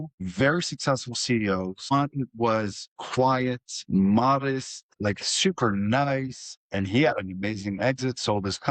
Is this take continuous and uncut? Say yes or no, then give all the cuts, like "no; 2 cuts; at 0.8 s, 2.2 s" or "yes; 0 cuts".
yes; 0 cuts